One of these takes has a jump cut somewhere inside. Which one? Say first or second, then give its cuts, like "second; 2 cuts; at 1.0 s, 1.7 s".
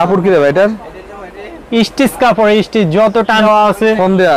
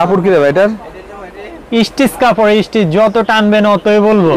first; 1 cut; at 3.4 s